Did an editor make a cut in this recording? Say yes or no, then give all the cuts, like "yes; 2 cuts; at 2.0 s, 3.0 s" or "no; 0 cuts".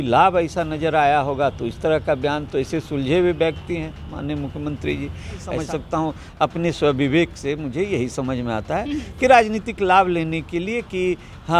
yes; 1 cut; at 5.5 s